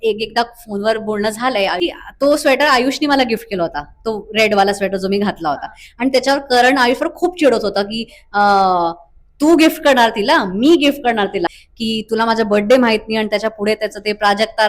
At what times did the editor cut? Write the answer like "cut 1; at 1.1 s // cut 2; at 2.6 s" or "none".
cut 1; at 1.8 s // cut 2; at 11.5 s